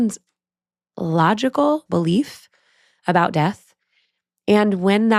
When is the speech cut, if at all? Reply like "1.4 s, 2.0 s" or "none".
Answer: 1.8 s

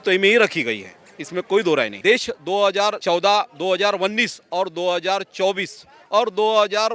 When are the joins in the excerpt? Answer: 1.9 s, 3.0 s

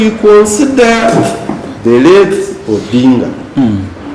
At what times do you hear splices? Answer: none

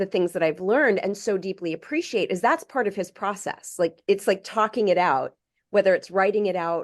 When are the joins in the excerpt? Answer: 4.0 s

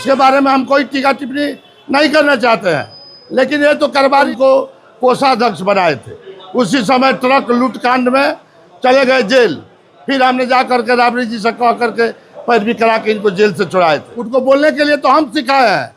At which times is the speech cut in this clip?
4.3 s, 14.1 s

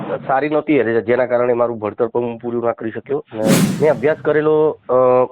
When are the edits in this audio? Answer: 3.7 s

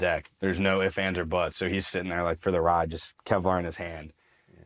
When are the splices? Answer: none

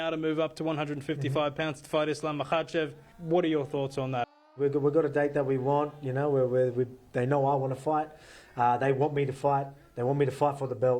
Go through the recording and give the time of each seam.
3.1 s, 4.4 s

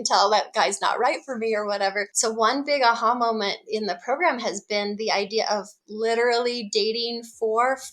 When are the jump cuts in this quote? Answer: 2.1 s

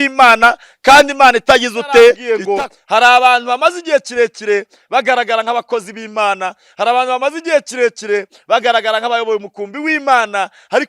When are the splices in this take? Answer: 2.3 s

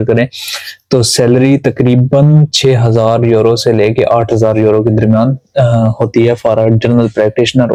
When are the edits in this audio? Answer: none

